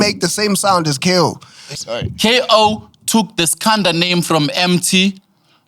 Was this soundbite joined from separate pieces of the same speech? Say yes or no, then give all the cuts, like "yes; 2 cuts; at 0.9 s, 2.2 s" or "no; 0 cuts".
yes; 1 cut; at 1.7 s